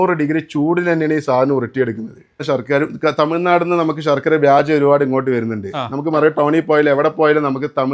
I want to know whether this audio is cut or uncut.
cut